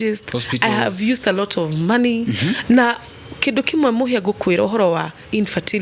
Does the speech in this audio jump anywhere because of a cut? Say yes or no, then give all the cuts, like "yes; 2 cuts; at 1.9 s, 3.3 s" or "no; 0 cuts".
no; 0 cuts